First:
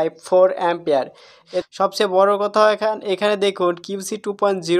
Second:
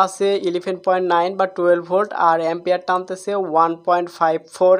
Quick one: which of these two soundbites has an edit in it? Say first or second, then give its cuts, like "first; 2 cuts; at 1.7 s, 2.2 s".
first; 1 cut; at 1.5 s